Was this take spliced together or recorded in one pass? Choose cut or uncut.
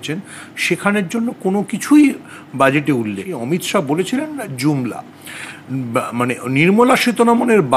cut